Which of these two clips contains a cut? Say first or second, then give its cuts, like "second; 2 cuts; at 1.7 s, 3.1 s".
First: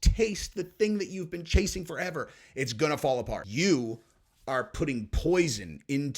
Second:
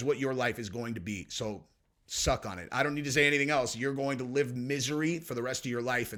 first; 1 cut; at 3.5 s